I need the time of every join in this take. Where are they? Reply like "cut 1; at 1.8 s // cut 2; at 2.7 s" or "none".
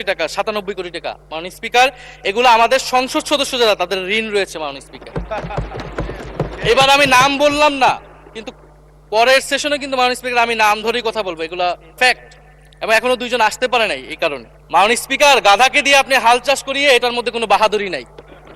cut 1; at 14.5 s